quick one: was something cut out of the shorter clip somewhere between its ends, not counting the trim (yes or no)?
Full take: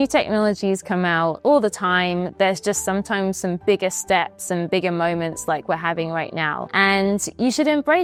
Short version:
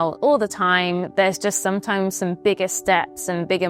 no